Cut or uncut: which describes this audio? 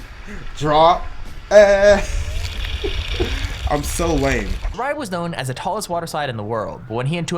cut